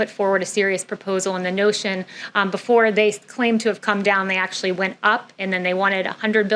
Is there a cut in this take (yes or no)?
no